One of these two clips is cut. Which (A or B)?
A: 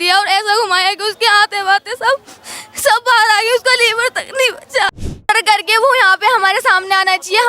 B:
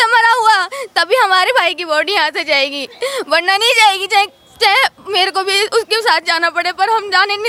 A